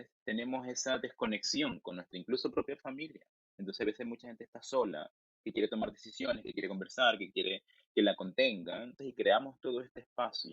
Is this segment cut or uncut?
cut